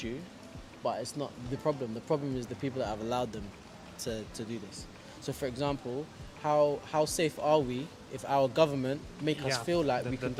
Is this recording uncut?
yes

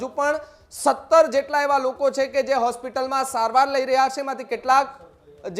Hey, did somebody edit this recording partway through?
no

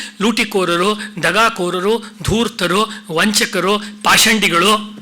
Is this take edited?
no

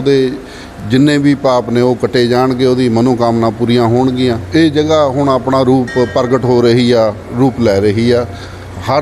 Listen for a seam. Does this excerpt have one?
yes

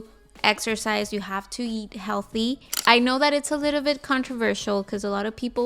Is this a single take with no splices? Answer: no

